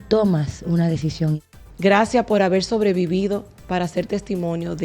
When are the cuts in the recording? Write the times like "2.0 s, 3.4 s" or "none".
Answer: 1.4 s